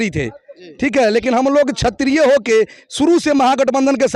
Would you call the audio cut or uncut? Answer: uncut